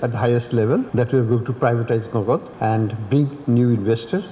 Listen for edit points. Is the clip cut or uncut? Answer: cut